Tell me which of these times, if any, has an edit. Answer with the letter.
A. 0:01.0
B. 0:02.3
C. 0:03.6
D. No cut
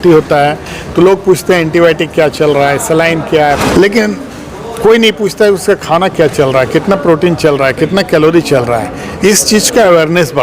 C